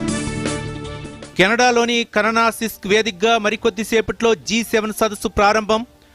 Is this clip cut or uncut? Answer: cut